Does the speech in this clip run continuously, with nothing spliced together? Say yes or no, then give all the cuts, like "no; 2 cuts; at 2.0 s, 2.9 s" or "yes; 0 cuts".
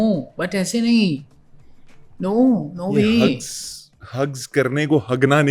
yes; 0 cuts